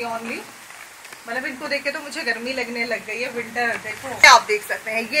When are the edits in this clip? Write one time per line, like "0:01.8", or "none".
0:04.2

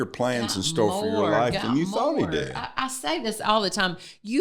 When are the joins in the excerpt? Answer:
none

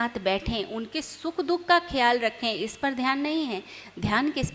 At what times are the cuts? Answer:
none

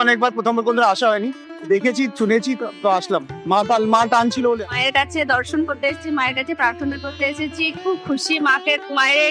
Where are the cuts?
0:04.6

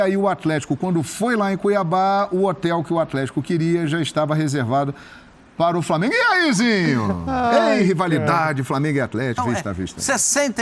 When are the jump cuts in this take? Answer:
0:09.4

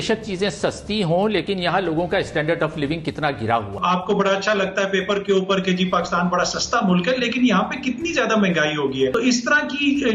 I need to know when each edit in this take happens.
0:03.7
0:09.1

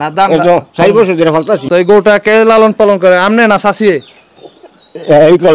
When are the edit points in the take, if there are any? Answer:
0:01.6

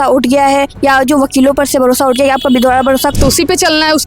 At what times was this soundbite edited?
0:03.1

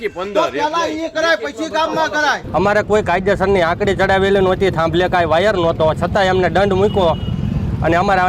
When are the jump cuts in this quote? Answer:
0:02.4

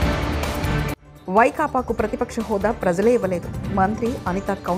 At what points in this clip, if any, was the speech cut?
0:01.0

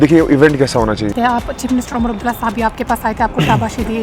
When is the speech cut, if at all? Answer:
0:01.1

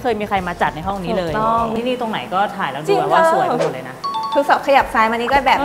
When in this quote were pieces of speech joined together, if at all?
0:01.7

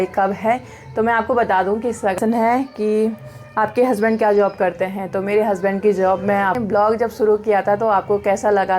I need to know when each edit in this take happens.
0:02.2
0:06.6

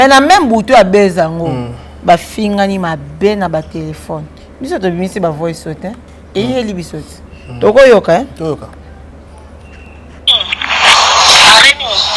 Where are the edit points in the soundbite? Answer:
none

